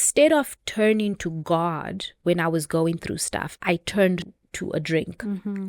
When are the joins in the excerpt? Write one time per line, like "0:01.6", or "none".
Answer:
0:04.4